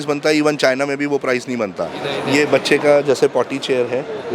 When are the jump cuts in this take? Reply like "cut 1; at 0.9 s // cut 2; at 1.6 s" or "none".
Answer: cut 1; at 2.1 s